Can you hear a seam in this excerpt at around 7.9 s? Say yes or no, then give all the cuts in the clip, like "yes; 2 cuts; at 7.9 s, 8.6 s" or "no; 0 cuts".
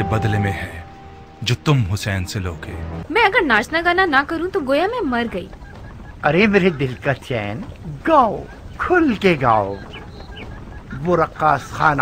no; 1 cut; at 3.0 s